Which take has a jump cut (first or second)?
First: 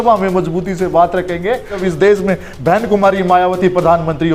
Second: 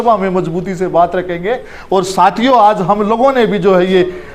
first